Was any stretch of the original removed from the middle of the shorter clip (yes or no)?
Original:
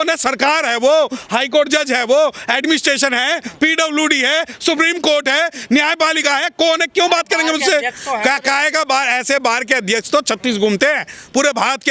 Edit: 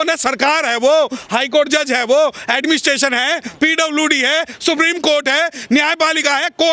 no